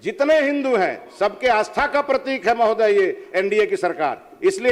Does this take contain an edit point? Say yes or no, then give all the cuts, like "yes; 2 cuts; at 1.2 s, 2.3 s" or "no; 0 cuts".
no; 0 cuts